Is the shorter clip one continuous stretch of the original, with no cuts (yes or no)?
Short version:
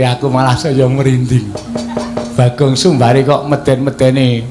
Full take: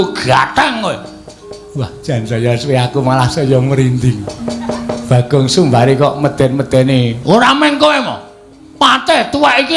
yes